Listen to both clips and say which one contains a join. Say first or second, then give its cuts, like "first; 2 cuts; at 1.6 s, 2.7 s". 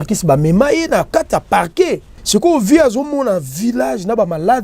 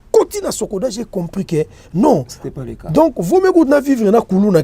first; 1 cut; at 2.1 s